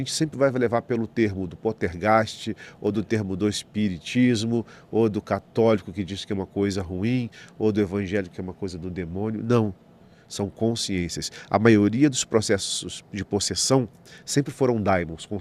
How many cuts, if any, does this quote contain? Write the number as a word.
zero